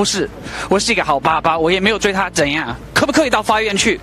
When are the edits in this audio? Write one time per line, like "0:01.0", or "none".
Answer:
0:02.8